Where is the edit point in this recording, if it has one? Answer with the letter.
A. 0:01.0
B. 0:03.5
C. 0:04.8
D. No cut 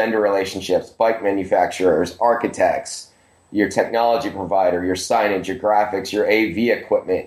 D